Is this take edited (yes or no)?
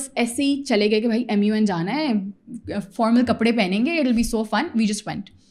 no